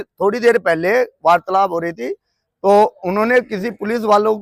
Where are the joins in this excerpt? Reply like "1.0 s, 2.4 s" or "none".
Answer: none